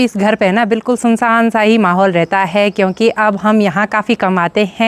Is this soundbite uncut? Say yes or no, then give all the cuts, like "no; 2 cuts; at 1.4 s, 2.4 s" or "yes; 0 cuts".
yes; 0 cuts